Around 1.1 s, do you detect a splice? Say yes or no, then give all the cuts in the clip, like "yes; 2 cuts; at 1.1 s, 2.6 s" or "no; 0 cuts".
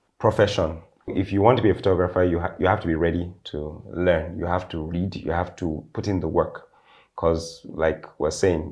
yes; 1 cut; at 1.1 s